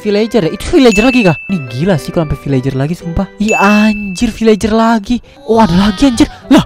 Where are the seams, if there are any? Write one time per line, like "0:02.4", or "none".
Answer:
0:05.3